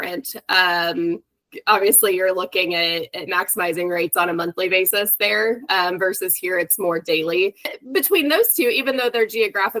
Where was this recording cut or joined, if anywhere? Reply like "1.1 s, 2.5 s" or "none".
7.7 s